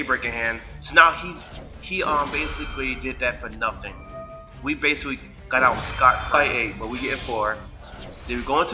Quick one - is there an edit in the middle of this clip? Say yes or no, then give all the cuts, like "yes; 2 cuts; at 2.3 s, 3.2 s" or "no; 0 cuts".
yes; 1 cut; at 6.3 s